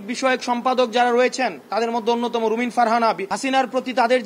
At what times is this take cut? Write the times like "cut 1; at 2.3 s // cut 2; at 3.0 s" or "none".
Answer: cut 1; at 3.3 s

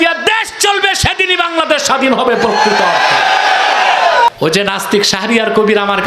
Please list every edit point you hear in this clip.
cut 1; at 4.3 s

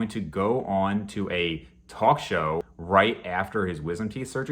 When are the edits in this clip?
cut 1; at 2.7 s

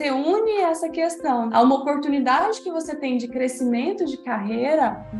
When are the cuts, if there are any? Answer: cut 1; at 1.5 s

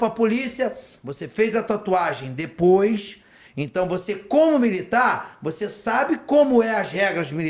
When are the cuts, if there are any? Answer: none

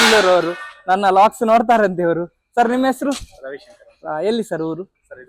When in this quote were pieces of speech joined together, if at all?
none

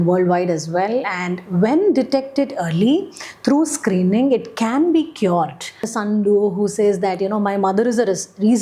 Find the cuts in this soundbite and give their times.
cut 1; at 5.9 s

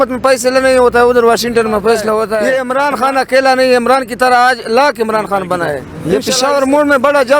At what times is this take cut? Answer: cut 1; at 2.4 s // cut 2; at 5.9 s

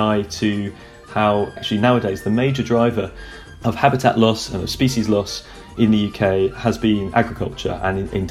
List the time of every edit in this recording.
cut 1; at 1.6 s

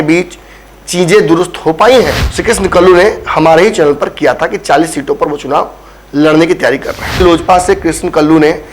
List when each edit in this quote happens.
cut 1; at 2.3 s // cut 2; at 7.2 s

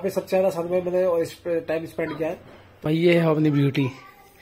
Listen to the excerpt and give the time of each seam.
cut 1; at 2.9 s

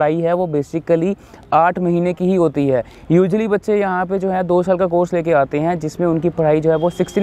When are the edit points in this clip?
none

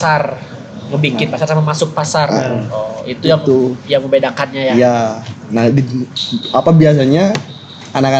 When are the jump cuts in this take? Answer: none

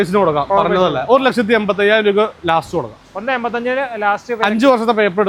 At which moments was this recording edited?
none

